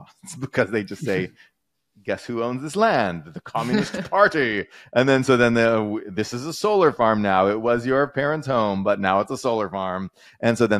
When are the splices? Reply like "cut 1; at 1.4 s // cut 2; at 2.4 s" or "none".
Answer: none